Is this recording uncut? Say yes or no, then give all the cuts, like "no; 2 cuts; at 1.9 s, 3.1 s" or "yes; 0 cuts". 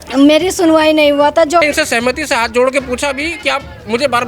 no; 1 cut; at 1.6 s